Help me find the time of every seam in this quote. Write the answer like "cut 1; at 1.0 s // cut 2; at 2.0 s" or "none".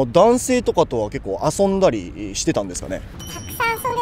none